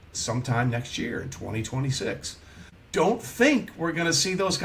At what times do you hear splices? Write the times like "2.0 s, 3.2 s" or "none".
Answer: 2.7 s